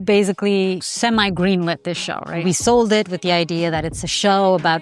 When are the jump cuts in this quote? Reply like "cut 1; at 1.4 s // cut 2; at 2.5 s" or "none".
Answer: cut 1; at 0.9 s // cut 2; at 2.4 s